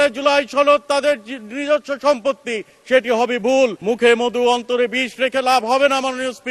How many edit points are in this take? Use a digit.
1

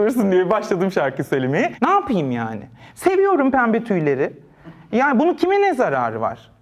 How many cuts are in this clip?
1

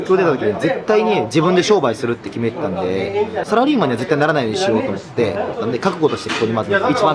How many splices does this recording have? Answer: 2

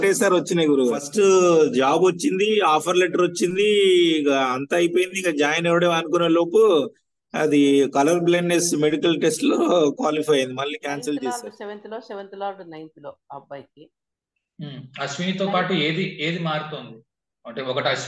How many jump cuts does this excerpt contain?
2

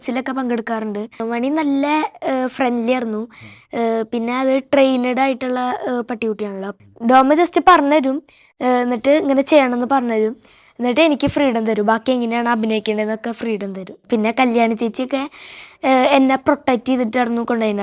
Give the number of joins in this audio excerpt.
3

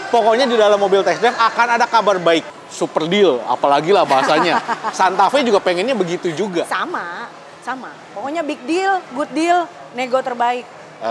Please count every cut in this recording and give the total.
1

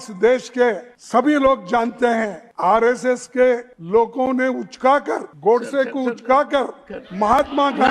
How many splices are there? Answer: 4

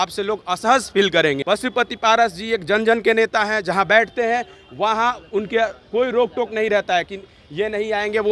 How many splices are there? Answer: 1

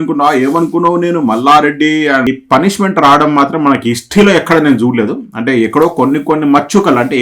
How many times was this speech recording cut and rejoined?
1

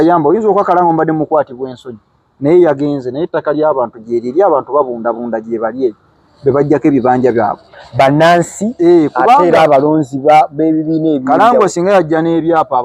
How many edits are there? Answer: 0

